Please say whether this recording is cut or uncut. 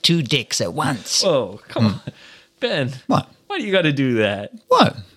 uncut